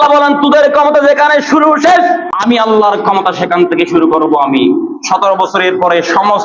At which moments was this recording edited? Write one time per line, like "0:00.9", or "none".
0:02.3